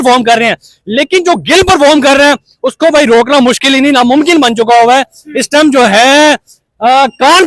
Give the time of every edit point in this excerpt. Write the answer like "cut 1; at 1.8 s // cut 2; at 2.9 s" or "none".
none